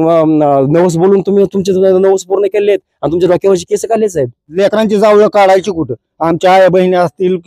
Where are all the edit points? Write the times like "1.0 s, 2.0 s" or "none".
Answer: 4.5 s